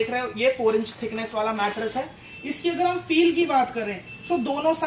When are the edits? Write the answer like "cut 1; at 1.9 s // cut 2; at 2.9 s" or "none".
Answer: none